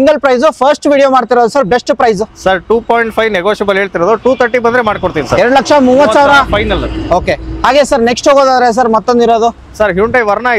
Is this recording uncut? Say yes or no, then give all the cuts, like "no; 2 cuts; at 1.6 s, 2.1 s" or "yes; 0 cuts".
yes; 0 cuts